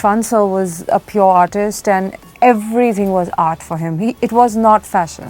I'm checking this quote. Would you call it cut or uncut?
cut